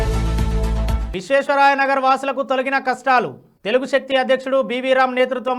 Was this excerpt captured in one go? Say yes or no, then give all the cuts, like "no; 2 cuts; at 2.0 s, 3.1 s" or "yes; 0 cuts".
no; 1 cut; at 1.0 s